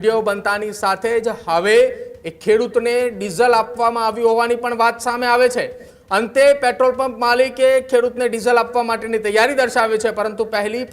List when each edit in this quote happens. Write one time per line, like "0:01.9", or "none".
none